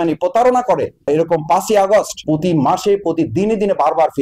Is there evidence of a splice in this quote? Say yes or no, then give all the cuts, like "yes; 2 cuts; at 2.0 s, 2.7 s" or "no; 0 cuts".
no; 0 cuts